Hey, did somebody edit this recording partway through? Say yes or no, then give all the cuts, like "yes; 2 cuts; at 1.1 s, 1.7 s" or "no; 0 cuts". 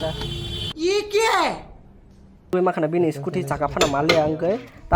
yes; 1 cut; at 2.5 s